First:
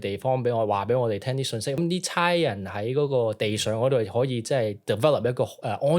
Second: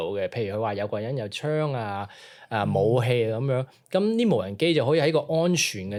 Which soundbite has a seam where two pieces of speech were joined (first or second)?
first